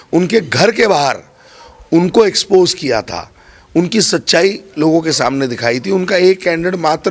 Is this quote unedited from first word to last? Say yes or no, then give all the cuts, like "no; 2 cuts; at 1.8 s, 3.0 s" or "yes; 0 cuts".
yes; 0 cuts